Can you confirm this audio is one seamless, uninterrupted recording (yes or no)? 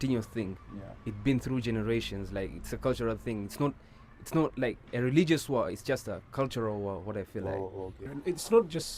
no